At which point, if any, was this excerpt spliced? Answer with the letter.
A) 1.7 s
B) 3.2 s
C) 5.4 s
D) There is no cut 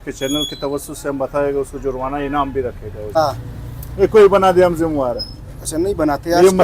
B